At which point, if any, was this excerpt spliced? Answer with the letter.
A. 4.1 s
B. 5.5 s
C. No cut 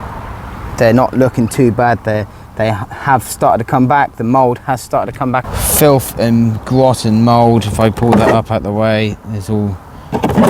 B